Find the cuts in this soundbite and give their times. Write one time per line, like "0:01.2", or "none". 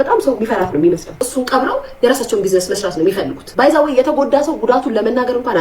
0:01.3
0:03.4